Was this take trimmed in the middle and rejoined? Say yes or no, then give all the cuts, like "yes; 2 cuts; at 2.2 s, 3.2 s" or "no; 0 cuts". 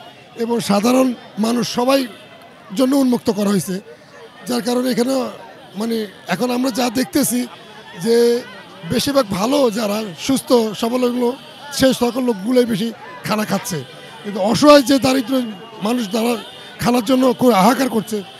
no; 0 cuts